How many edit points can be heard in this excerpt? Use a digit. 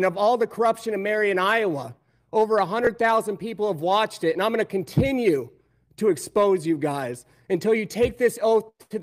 0